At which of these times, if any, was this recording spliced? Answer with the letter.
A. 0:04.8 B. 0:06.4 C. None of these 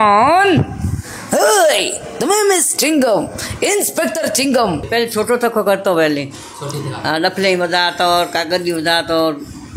A